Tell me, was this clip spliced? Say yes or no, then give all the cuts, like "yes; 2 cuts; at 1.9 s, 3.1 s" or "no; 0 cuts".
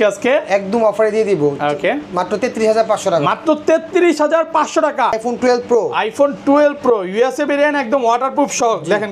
yes; 1 cut; at 5.2 s